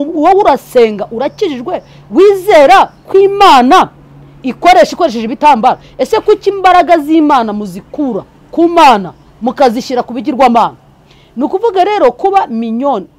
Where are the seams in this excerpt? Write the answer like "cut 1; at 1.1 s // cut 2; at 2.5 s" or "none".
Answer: none